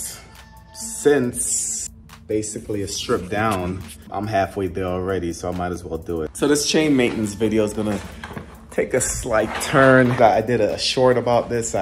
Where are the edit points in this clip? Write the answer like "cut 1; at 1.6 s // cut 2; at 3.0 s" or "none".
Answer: none